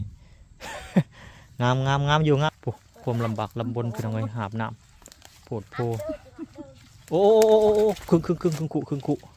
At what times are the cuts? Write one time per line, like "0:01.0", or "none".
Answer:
0:02.5

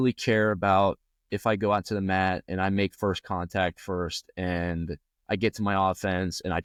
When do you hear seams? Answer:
none

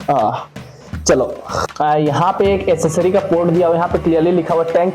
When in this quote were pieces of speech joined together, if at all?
0:01.6

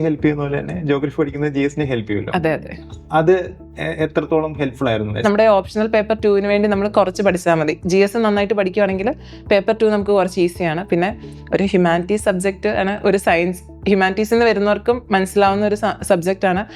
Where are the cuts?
0:05.2

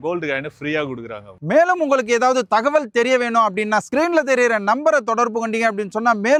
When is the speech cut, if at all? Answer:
none

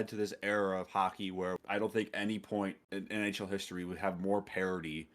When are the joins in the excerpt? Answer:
0:01.6
0:02.8

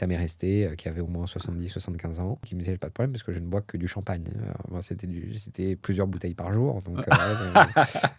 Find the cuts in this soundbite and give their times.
0:02.5

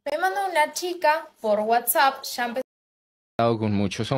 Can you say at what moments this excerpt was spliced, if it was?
0:02.8

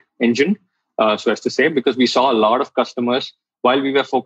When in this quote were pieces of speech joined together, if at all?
none

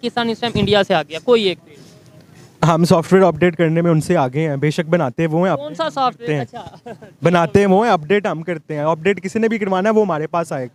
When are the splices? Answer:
none

